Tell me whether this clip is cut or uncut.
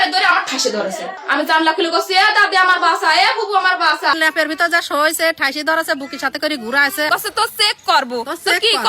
cut